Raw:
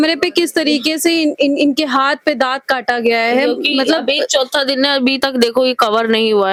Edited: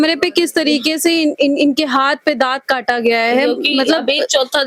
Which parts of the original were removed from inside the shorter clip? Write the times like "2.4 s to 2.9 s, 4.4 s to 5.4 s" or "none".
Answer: none